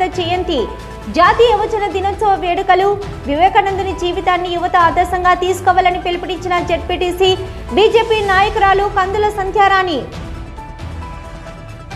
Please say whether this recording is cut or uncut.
uncut